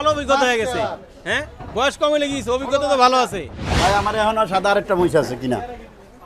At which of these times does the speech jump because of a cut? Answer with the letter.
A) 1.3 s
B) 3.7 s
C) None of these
B